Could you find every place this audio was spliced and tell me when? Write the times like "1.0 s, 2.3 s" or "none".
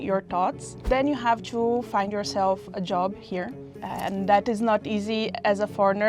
0.8 s, 3.7 s